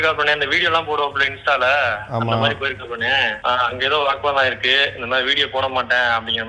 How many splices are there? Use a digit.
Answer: 1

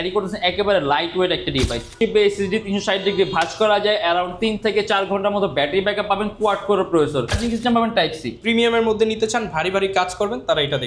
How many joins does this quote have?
2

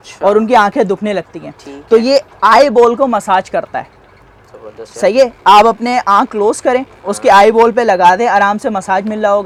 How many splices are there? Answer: 0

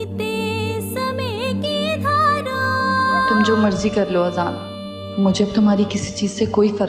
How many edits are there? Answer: 1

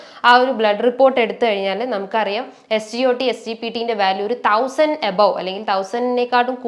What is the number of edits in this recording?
0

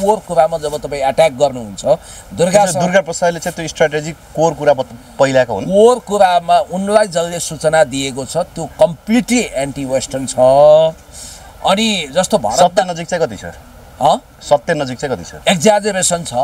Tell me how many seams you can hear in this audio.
0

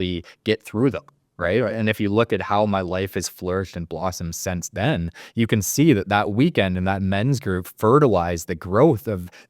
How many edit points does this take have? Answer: 0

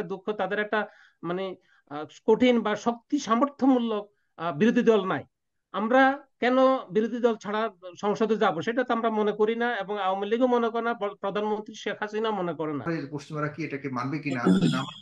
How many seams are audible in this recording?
1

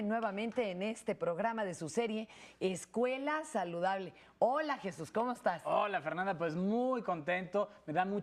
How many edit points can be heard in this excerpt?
1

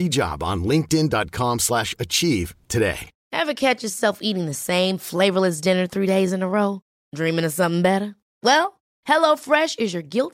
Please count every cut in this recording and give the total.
1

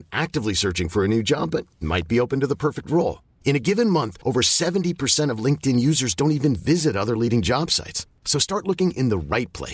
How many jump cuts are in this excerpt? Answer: 0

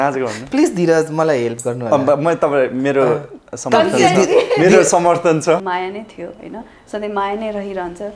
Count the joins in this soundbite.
1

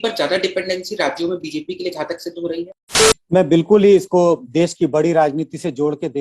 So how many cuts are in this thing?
1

